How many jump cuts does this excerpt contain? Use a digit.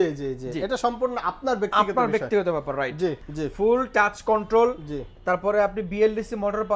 1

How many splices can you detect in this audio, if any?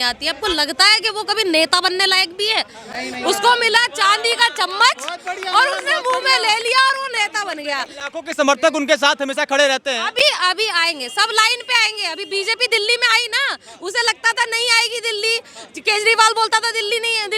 0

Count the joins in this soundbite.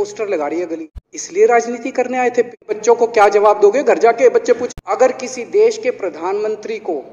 3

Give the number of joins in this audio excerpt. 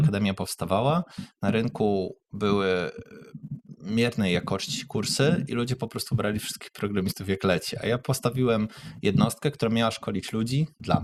0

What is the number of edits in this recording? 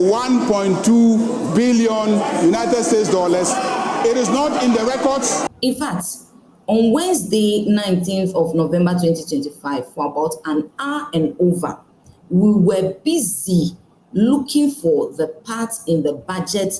1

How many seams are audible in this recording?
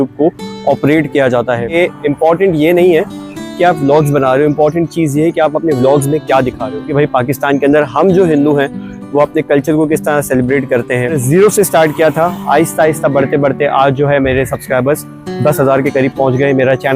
3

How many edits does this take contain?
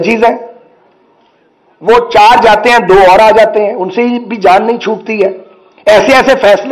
0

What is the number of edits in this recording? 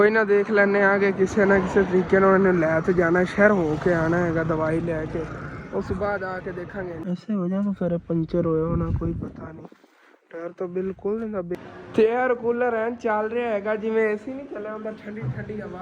2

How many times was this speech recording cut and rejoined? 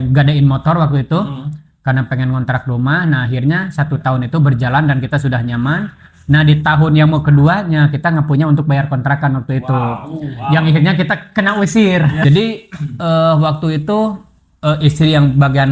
1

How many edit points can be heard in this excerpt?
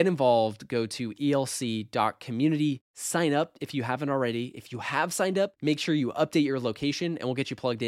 0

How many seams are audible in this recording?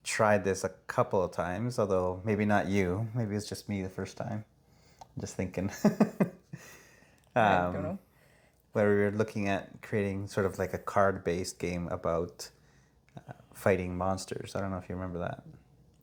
0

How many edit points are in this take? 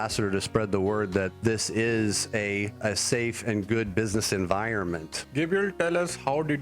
3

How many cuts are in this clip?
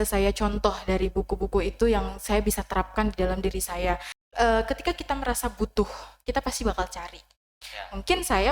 1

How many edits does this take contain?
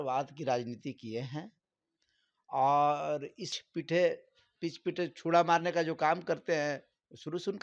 1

